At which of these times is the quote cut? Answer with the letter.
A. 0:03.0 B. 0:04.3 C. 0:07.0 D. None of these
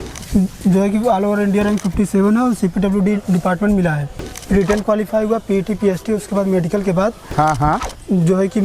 B